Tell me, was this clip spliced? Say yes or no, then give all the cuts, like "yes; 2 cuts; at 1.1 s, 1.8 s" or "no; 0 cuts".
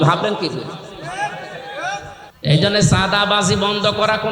yes; 1 cut; at 2.2 s